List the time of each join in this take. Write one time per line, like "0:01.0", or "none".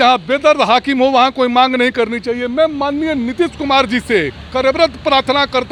none